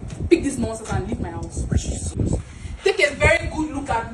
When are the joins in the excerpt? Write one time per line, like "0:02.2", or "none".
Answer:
0:02.1